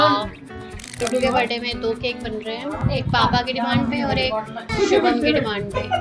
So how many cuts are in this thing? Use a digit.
3